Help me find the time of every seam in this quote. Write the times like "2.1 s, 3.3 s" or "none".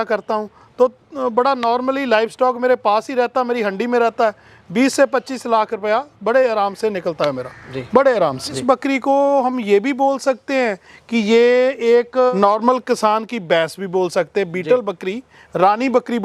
8.5 s, 12.3 s